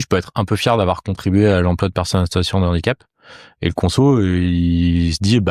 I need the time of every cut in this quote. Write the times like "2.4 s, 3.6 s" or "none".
none